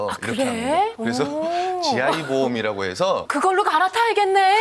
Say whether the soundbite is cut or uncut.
cut